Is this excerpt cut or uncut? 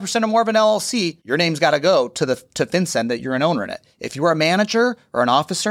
cut